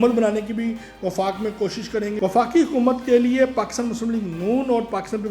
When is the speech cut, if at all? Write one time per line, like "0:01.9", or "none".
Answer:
0:02.2